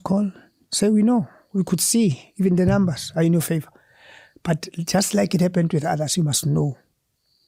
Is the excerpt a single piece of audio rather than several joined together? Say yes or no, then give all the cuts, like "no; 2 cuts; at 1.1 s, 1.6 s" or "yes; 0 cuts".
yes; 0 cuts